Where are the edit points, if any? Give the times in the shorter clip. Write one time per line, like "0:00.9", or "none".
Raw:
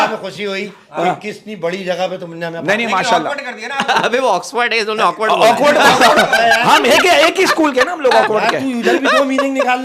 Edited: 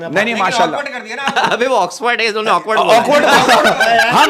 none